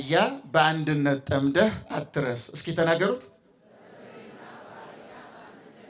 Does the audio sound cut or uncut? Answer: uncut